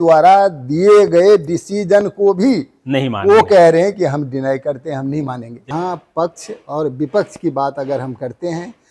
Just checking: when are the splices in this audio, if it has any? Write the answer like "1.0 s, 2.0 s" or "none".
5.7 s